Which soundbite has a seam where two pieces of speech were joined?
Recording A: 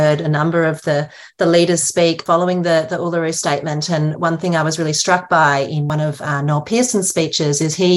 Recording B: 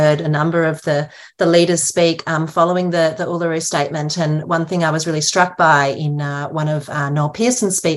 A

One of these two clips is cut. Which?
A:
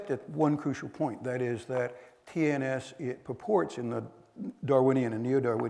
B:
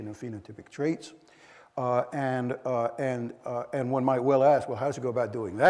A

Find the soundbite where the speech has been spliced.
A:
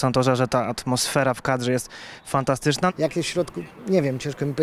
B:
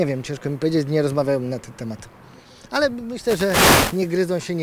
A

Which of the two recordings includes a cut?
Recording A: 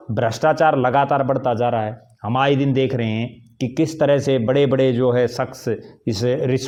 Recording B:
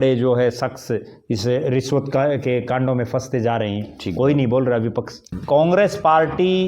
B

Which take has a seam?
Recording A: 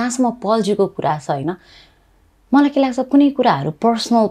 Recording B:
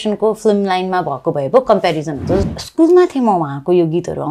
B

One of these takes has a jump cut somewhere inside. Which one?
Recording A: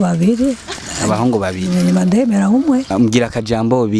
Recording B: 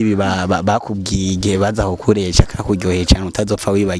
A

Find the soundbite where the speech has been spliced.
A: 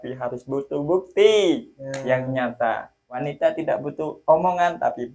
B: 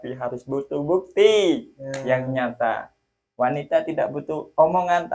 A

